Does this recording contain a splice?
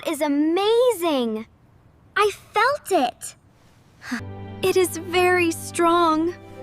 no; 0 cuts

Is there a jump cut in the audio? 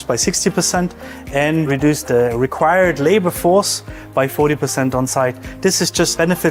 no; 0 cuts

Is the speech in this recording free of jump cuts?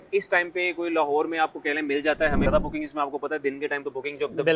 no; 1 cut; at 2.4 s

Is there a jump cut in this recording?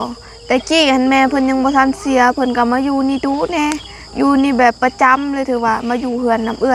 no; 0 cuts

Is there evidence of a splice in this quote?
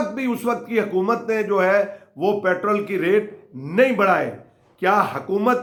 no; 0 cuts

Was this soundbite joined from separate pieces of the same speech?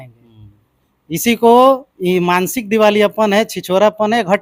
no; 0 cuts

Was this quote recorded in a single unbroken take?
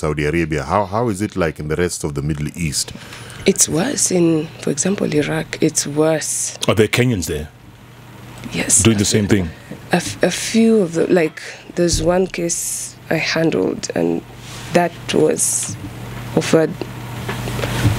yes; 0 cuts

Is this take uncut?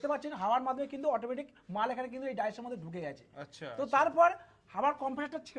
yes; 0 cuts

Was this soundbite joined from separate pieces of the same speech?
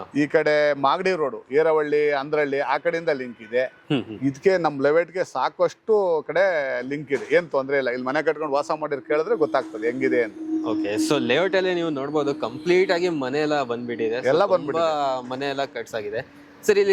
no; 0 cuts

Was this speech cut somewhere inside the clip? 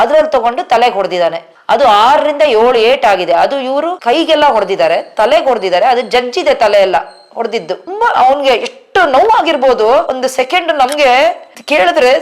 yes; 1 cut; at 3.9 s

